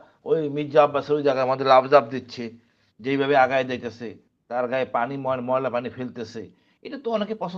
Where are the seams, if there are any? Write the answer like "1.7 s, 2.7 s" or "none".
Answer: none